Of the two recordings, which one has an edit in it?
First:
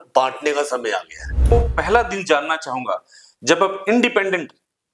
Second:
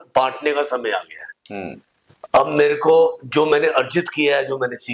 first; 1 cut; at 1.5 s

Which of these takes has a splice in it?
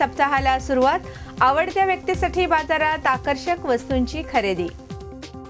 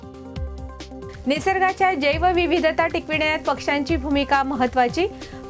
second; 1 cut; at 0.9 s

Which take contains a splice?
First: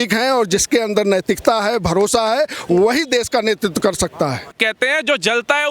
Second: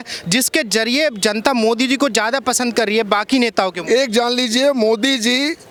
first; 1 cut; at 4.5 s

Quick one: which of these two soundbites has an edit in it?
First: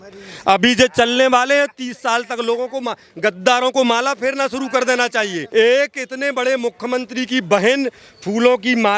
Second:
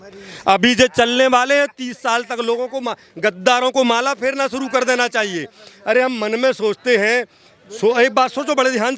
first; 1 cut; at 5.4 s

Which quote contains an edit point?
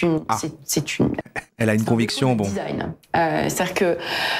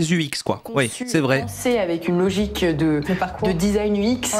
first; 1 cut; at 1.4 s

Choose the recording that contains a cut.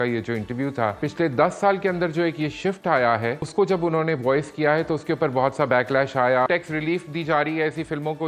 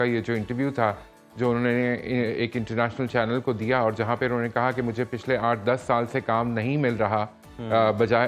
first; 3 cuts; at 1.0 s, 3.5 s, 6.5 s

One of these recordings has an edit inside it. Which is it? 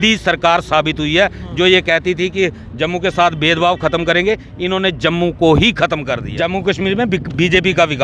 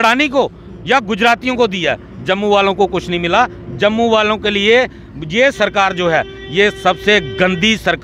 first; 1 cut; at 6.3 s

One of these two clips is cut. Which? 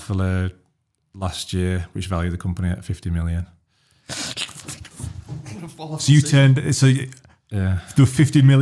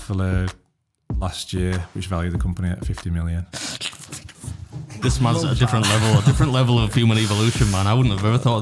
second; 2 cuts; at 3.5 s, 5.0 s

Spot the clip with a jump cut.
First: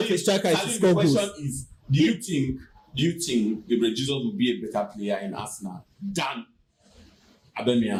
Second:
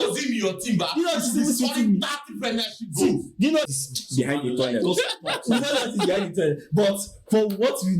second; 1 cut; at 3.7 s

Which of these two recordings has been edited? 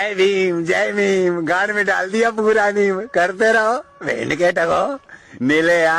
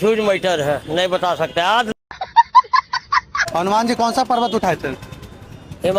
second; 2 cuts; at 1.9 s, 3.4 s

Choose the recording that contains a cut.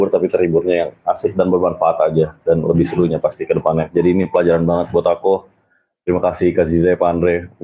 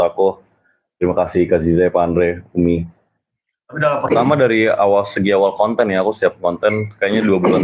second; 1 cut; at 4.1 s

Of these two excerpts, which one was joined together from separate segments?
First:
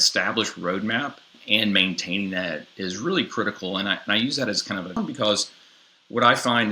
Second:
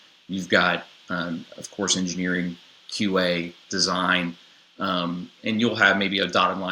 first; 2 cuts; at 1.4 s, 5.0 s

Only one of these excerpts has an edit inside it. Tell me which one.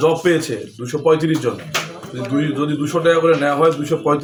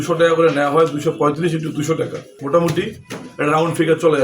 second; 1 cut; at 2.3 s

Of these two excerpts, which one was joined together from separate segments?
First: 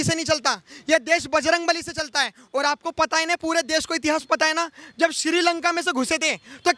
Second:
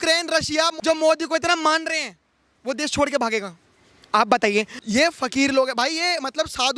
second; 2 cuts; at 2.5 s, 4.8 s

